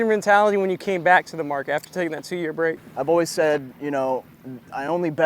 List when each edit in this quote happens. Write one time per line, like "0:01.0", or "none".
0:02.9